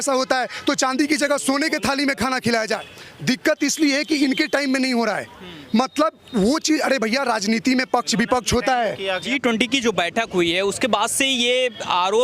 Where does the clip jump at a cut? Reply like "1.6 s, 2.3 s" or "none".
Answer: 2.9 s, 9.2 s